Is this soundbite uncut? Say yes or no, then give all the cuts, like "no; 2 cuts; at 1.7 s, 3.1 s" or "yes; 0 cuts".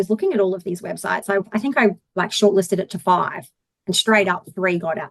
no; 1 cut; at 2.0 s